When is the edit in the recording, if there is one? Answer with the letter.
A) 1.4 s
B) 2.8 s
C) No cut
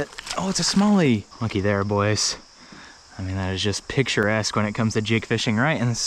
A